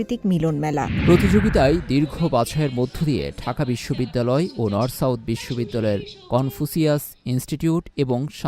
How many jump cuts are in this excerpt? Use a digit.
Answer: 1